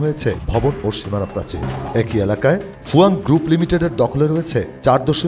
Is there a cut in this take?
yes; 1 cut; at 1.7 s

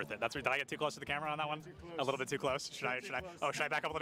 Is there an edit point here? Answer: no; 0 cuts

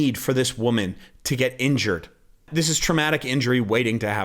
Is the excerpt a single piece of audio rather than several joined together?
no; 1 cut; at 2.5 s

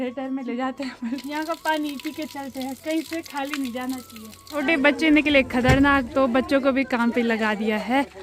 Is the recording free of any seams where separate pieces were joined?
no; 2 cuts; at 1.2 s, 4.6 s

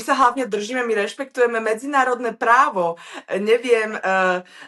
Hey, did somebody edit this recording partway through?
no; 0 cuts

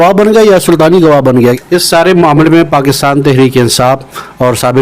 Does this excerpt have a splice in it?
yes; 1 cut; at 1.6 s

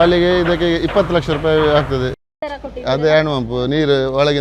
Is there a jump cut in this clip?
yes; 1 cut; at 2.1 s

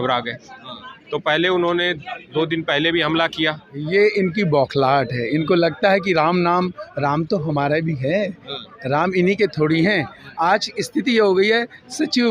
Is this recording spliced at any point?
yes; 1 cut; at 3.7 s

